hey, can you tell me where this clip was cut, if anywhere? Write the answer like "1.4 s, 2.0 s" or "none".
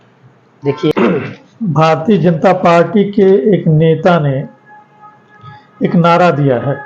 0.9 s